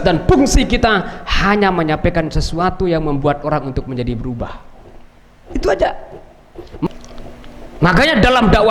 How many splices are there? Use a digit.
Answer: 1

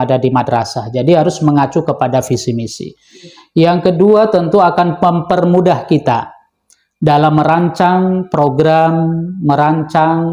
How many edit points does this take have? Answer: 0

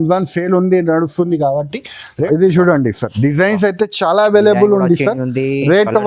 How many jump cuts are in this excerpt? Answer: 1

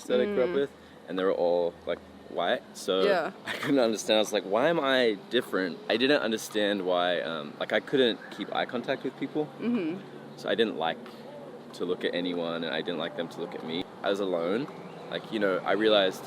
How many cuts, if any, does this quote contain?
2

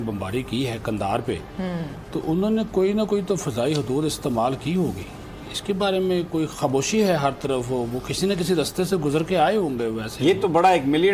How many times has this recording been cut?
0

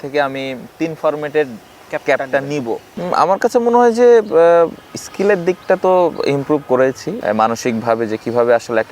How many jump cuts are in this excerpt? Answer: 2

